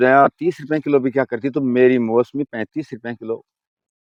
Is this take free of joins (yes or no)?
yes